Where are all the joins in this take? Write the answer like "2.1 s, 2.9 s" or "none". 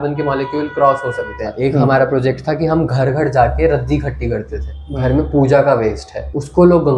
1.5 s, 4.9 s